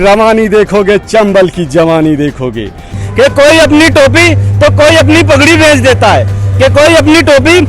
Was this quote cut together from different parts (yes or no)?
yes